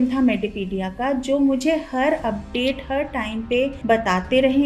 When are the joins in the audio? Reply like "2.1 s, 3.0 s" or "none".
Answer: none